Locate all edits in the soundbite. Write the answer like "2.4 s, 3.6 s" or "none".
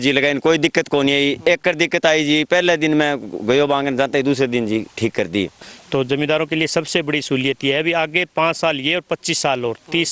5.6 s